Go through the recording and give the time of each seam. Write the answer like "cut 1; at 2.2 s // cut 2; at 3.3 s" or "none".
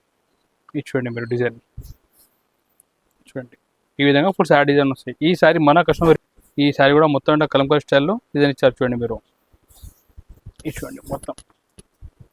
cut 1; at 6.2 s